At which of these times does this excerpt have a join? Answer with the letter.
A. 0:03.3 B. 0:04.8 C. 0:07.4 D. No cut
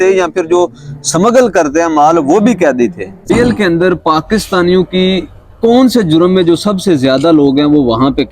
A